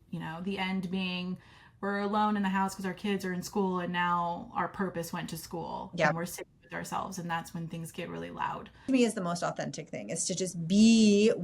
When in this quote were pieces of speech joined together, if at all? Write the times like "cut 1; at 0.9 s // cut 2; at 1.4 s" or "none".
cut 1; at 8.9 s

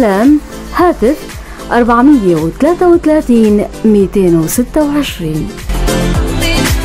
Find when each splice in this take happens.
none

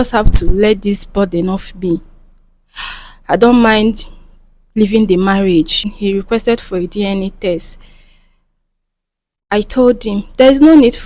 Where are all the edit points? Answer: cut 1; at 5.9 s

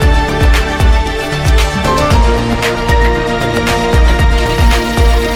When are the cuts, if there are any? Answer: none

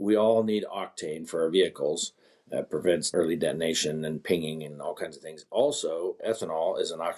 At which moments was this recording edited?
cut 1; at 3.1 s

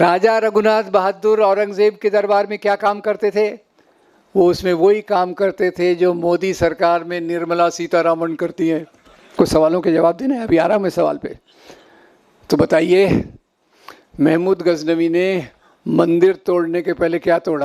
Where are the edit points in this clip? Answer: cut 1; at 9.3 s

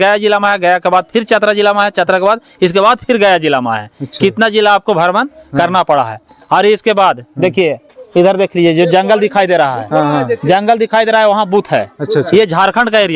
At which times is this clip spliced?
none

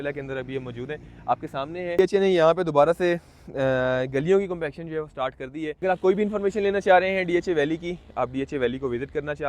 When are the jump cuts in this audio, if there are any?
cut 1; at 2.0 s // cut 2; at 5.8 s

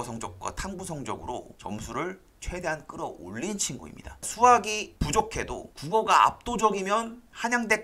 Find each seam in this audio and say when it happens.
cut 1; at 4.1 s

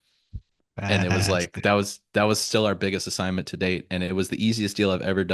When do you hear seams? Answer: none

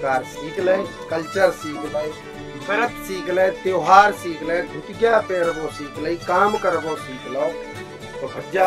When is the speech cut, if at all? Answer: none

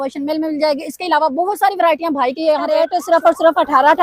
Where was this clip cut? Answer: cut 1; at 2.9 s

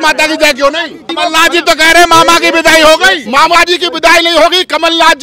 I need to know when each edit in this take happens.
cut 1; at 1.1 s

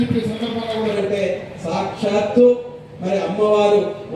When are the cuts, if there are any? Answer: cut 1; at 0.9 s

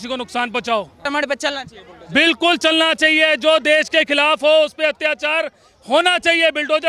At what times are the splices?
cut 1; at 1.0 s

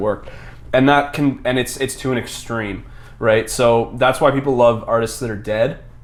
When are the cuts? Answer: none

